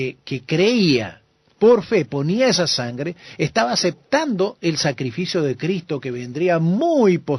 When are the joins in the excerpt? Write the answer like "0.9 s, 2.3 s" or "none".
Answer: 5.8 s